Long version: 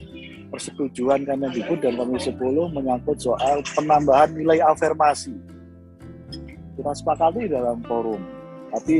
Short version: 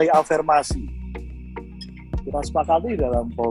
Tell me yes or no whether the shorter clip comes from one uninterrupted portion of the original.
yes